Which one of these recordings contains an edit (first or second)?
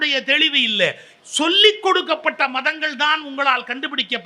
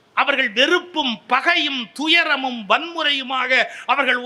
first